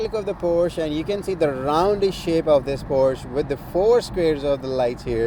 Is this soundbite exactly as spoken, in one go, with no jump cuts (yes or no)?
yes